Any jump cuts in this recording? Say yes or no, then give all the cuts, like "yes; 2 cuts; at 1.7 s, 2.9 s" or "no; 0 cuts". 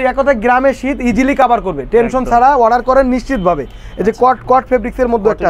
no; 0 cuts